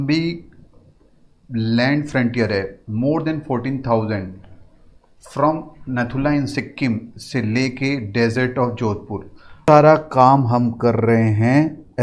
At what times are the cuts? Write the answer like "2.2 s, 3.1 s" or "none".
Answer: 9.7 s